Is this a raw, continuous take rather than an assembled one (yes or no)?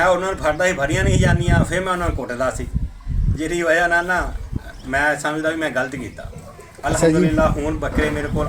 yes